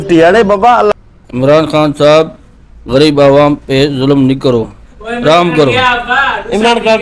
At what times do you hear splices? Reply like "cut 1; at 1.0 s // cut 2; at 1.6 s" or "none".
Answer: cut 1; at 0.9 s